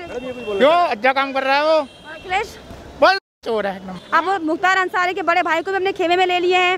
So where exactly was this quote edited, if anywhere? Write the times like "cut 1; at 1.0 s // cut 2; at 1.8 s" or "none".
cut 1; at 3.9 s